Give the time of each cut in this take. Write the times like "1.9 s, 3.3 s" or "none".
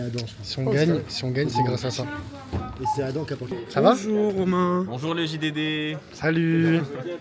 3.4 s